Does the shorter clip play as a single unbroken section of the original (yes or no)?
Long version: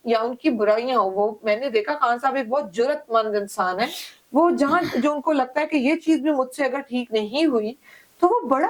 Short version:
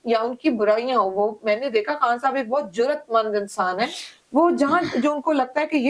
yes